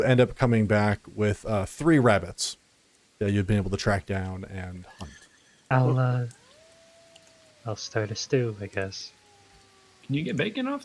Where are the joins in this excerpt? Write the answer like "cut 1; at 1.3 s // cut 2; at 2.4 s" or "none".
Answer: cut 1; at 5.7 s